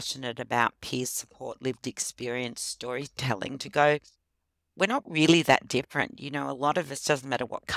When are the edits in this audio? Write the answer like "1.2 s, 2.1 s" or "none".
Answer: none